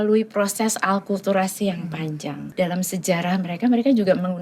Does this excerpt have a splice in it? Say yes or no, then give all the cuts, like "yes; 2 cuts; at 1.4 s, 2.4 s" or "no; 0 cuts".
yes; 1 cut; at 2.4 s